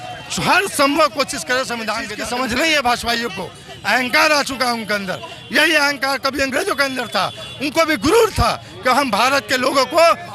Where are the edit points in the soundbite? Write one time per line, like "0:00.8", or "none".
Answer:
0:02.1